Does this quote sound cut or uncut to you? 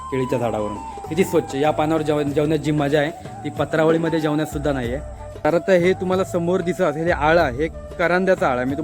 cut